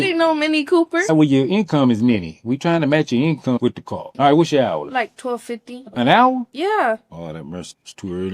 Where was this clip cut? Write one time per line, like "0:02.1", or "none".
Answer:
0:01.2
0:04.1

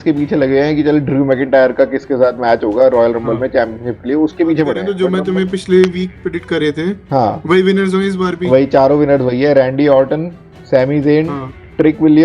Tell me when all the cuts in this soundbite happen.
0:04.9

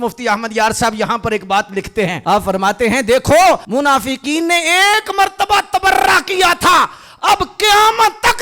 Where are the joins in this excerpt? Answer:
0:02.2
0:03.6

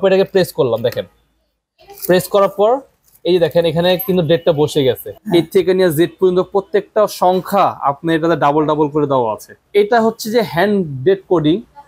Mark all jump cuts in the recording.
0:05.1
0:09.6

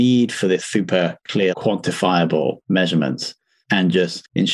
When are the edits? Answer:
0:01.5

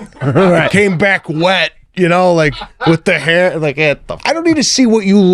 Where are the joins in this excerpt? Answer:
0:04.1

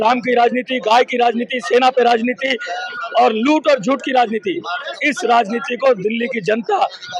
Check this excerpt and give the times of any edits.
none

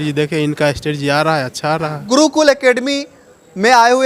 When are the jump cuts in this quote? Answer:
0:02.0

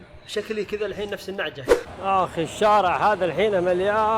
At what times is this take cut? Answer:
0:01.9

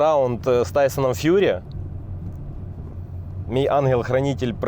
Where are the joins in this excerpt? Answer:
none

